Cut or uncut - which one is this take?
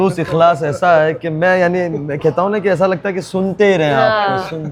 uncut